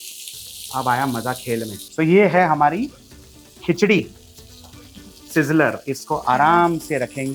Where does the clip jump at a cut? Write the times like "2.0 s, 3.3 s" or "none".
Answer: 1.8 s